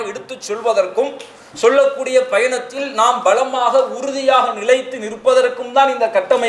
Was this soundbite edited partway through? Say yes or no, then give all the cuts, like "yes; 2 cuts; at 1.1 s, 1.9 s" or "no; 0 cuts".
no; 0 cuts